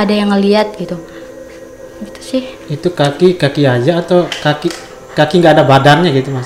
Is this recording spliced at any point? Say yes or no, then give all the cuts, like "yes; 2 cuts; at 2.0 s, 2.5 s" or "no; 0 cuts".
no; 0 cuts